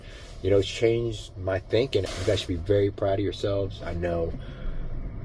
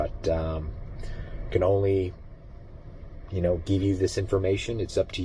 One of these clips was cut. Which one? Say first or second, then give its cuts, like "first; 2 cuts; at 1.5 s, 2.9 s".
first; 1 cut; at 2.0 s